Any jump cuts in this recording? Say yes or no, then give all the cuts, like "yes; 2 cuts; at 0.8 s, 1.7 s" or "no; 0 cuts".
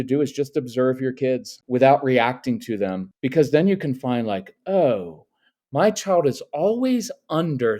yes; 2 cuts; at 1.5 s, 3.1 s